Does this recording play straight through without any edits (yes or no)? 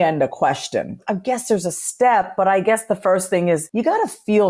no